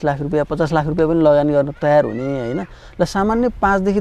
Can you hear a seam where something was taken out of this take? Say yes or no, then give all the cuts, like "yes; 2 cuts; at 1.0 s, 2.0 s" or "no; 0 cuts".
no; 0 cuts